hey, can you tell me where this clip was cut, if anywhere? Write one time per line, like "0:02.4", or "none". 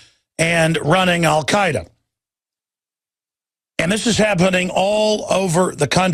none